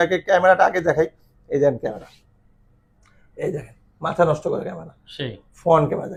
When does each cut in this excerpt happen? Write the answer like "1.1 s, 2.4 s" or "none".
none

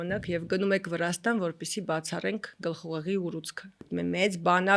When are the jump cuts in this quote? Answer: 3.8 s

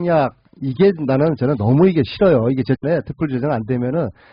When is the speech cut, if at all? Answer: 2.8 s

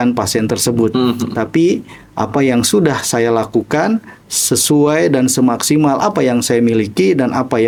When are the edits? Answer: none

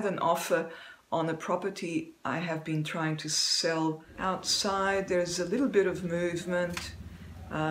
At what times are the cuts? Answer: 4.1 s

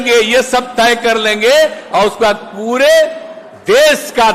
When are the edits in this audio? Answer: none

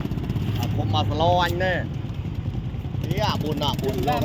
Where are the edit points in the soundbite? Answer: none

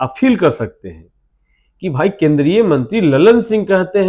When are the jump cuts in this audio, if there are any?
none

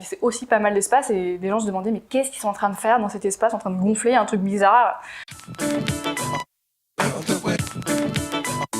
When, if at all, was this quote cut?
5.1 s

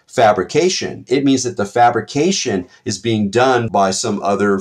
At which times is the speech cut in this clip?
3.7 s

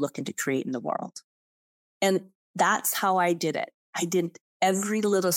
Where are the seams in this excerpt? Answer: none

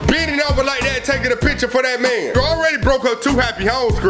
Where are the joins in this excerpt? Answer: 2.3 s

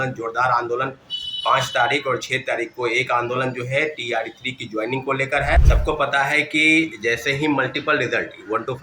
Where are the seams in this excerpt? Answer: 5.6 s

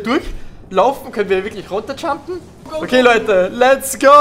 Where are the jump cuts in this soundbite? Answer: 2.7 s

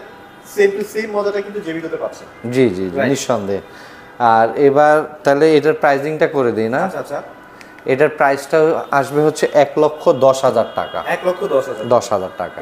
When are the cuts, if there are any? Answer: none

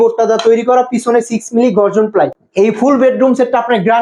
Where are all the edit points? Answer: 2.4 s

